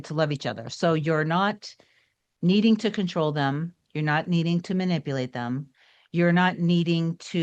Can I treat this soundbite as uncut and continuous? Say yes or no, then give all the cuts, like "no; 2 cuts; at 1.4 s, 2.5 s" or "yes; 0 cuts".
yes; 0 cuts